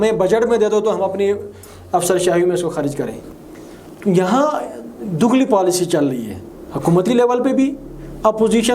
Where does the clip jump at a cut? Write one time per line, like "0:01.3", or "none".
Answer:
0:03.2